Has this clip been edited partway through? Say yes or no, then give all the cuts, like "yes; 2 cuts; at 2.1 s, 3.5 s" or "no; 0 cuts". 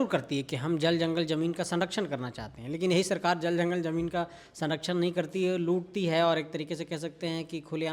no; 0 cuts